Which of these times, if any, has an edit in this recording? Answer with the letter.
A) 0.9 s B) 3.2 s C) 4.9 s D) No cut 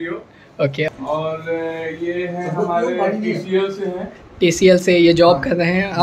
A